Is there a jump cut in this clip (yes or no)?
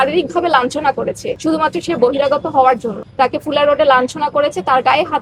no